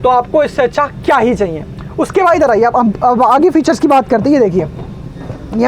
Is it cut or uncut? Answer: uncut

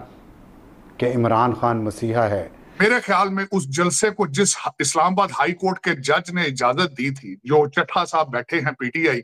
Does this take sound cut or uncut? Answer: cut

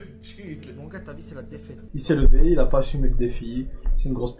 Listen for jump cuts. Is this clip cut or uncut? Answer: cut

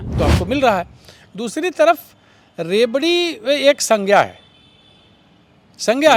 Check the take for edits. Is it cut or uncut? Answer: uncut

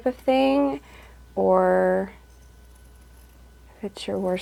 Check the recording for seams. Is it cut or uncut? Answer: uncut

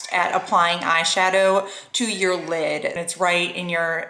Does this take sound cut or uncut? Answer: cut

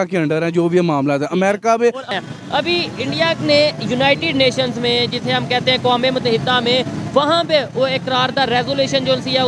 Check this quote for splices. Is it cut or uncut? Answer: cut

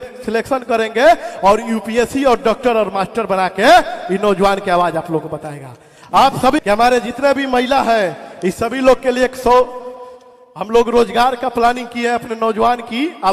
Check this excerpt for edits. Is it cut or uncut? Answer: cut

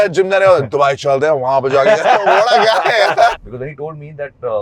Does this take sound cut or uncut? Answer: cut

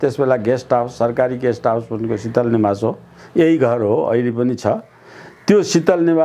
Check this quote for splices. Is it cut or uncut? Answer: uncut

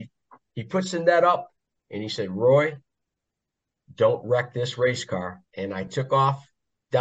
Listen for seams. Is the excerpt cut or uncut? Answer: cut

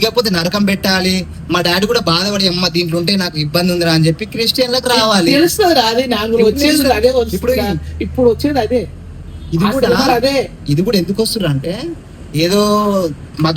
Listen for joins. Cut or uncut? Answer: uncut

